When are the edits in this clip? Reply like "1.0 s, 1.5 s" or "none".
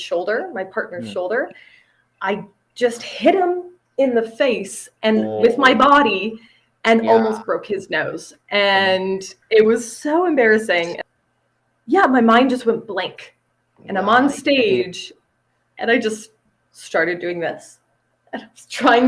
11.0 s